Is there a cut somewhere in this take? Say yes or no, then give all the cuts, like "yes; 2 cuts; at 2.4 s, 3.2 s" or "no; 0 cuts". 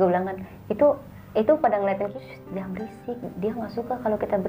yes; 1 cut; at 2.2 s